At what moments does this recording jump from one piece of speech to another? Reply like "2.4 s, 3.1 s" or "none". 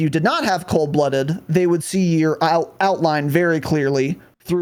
none